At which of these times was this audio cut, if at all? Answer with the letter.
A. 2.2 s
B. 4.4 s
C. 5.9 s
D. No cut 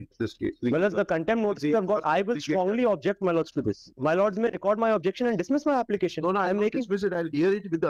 D